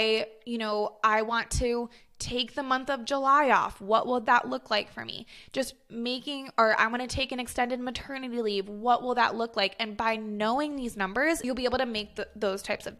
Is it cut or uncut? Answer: cut